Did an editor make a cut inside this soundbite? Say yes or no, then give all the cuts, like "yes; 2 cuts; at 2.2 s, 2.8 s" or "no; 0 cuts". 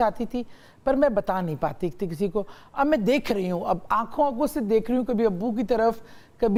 no; 0 cuts